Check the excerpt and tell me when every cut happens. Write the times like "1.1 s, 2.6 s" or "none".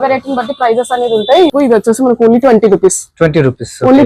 1.5 s